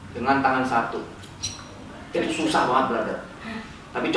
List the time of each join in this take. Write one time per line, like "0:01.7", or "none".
none